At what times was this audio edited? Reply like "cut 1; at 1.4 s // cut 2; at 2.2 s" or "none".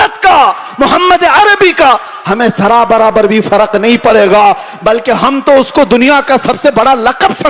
none